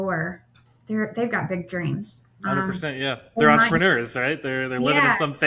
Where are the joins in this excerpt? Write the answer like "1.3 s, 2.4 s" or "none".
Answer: none